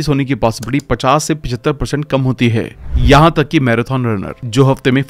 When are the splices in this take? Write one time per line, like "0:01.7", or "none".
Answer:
0:02.8

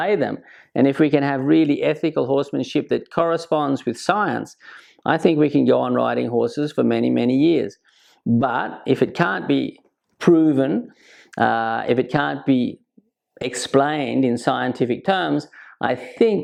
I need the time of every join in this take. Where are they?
none

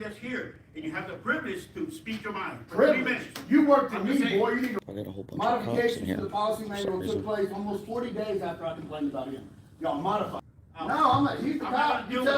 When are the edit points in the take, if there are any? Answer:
0:04.8
0:10.5

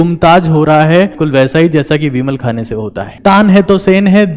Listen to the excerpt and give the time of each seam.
0:01.2
0:03.1

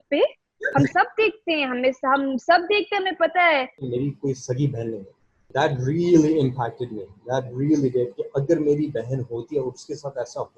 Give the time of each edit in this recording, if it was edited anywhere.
0:03.8
0:05.5

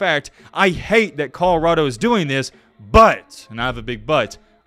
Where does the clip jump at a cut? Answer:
none

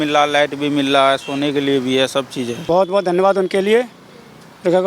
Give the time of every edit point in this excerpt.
0:02.6

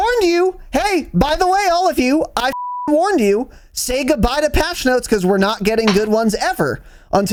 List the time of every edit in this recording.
none

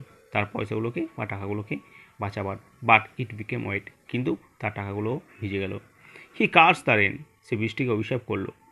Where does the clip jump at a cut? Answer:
none

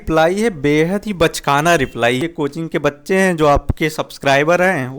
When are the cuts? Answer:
0:02.2

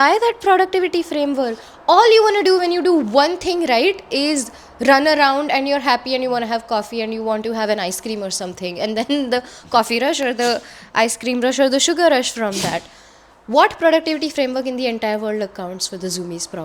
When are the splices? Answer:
none

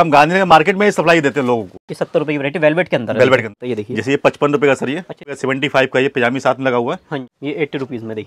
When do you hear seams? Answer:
0:01.9
0:03.6
0:05.4
0:07.3

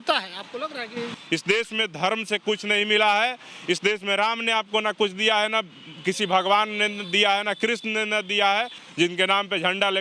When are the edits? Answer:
0:01.1
0:08.8

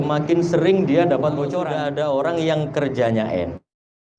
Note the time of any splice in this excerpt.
0:01.6

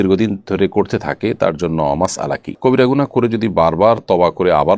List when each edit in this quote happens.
none

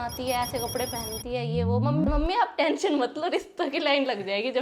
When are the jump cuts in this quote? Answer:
0:02.1

